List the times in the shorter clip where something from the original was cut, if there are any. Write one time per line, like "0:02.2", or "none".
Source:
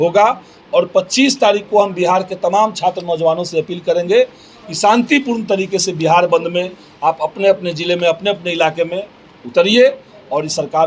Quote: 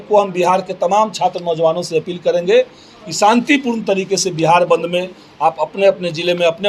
none